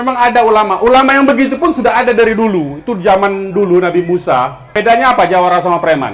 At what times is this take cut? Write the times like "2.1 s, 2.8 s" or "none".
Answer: 4.7 s